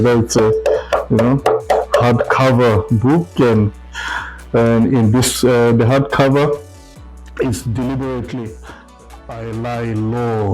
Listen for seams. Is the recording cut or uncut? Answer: cut